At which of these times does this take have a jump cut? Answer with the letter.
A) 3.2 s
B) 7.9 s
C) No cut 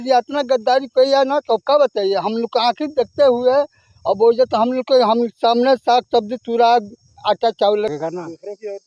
B